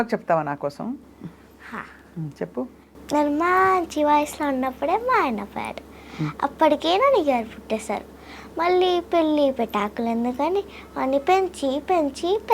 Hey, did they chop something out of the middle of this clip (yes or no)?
no